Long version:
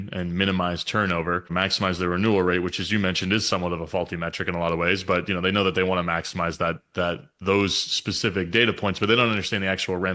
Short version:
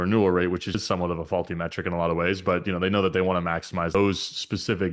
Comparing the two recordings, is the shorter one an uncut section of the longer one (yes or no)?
no